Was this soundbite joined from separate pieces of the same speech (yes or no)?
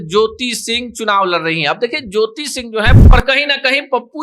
yes